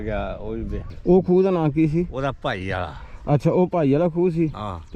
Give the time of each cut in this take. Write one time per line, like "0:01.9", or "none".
0:00.9